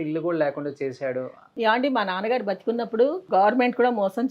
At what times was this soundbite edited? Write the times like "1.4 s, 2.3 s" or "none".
1.4 s, 3.2 s